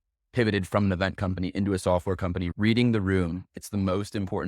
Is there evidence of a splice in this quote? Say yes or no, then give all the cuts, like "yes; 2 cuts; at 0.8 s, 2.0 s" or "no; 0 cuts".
yes; 1 cut; at 2.5 s